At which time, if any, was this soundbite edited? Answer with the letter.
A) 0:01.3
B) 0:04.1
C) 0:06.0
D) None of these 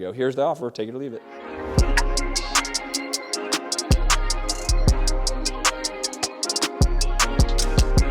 A